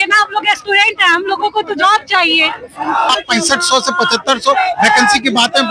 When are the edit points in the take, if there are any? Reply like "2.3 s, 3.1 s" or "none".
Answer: 3.1 s